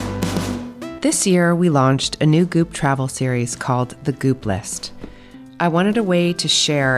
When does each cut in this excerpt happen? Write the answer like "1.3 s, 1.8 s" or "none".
0.9 s